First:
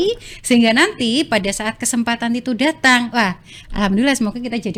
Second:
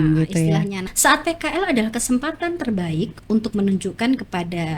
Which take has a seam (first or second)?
second